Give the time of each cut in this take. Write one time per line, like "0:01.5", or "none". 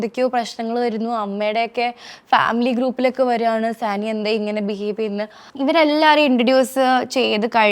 0:05.5